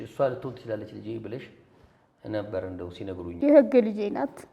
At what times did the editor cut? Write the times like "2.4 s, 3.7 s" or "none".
3.3 s